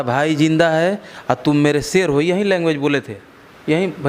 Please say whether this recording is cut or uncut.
uncut